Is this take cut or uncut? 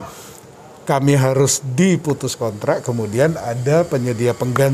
uncut